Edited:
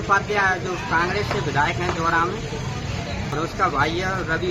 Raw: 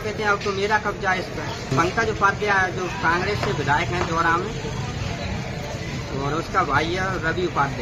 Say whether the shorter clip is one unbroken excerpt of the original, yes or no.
no